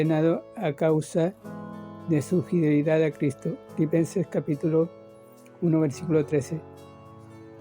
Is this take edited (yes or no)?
yes